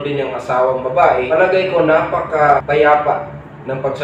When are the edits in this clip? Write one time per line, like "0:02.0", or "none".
0:01.3
0:02.6